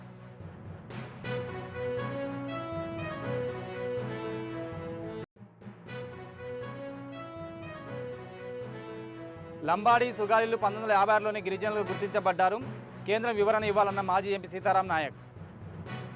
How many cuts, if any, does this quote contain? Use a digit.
1